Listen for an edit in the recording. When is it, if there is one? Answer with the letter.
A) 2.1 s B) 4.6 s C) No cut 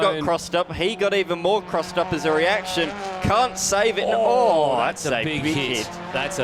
C